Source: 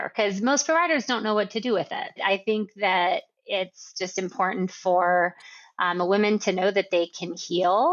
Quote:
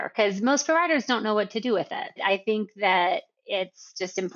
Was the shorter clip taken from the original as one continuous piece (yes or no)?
yes